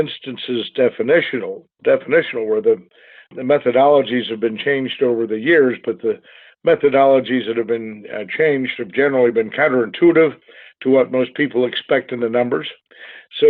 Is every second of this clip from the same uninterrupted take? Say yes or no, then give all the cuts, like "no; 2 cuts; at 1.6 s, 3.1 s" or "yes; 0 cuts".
yes; 0 cuts